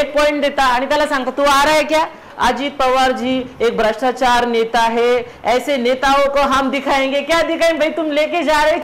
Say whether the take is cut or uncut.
cut